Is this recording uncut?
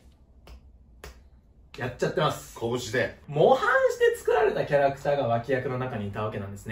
no; 1 cut; at 3.2 s

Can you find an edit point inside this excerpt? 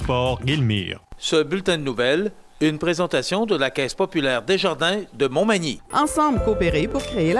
yes; 1 cut; at 1.1 s

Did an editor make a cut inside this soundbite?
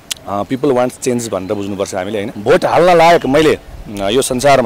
yes; 1 cut; at 2.3 s

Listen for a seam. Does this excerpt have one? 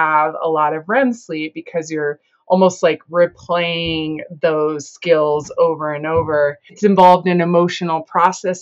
yes; 1 cut; at 6.8 s

